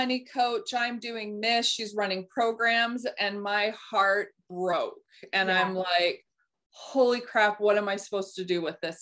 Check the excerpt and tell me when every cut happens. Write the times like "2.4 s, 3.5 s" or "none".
none